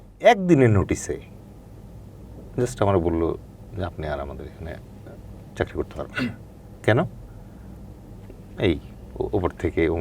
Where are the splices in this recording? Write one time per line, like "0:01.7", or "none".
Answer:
none